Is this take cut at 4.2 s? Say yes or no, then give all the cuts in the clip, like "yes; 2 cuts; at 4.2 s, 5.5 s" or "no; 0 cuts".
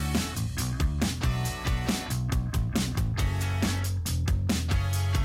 no; 1 cut; at 2.5 s